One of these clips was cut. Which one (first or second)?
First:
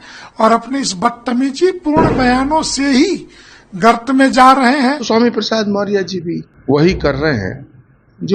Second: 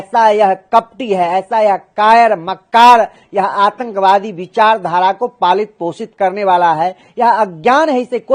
first